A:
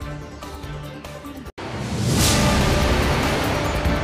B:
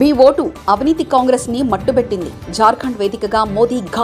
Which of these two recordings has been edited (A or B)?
A